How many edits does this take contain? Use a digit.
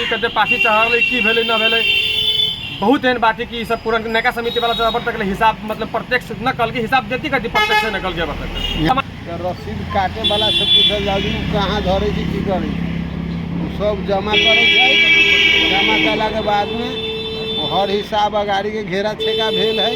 1